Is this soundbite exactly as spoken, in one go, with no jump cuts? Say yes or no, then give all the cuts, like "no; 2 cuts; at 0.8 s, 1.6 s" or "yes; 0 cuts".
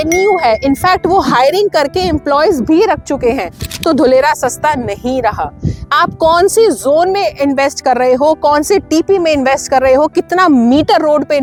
yes; 0 cuts